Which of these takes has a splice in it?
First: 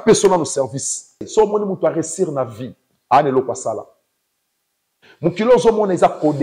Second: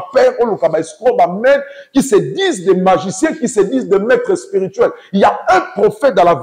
first; 1 cut; at 1.3 s

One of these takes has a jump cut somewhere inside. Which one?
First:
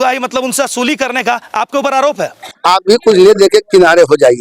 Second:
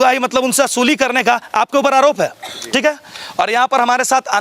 first; 1 cut; at 2.5 s

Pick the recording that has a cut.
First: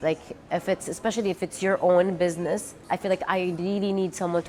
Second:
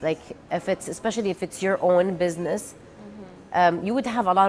first; 1 cut; at 2.8 s

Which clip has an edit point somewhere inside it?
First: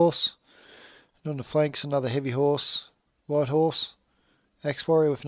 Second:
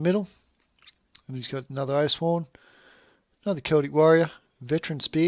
second; 1 cut; at 2.0 s

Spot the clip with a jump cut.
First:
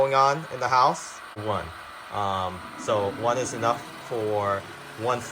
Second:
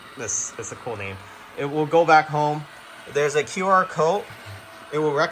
first; 1 cut; at 1.4 s

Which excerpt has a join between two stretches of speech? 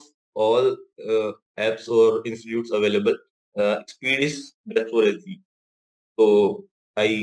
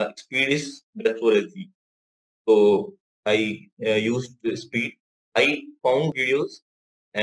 second; 1 cut; at 6.2 s

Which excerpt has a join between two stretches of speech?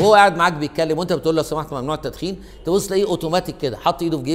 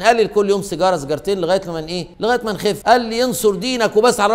second; 1 cut; at 2.4 s

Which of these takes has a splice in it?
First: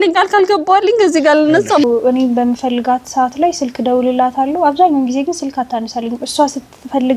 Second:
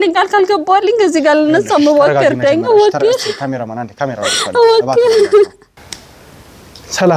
first; 1 cut; at 1.8 s

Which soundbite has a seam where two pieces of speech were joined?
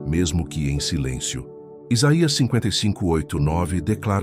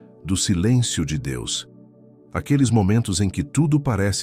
first; 1 cut; at 1.7 s

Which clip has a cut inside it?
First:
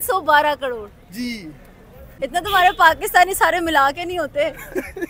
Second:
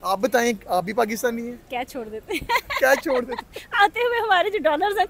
first; 1 cut; at 2.1 s

